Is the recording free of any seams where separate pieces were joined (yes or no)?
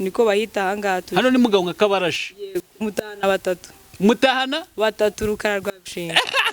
yes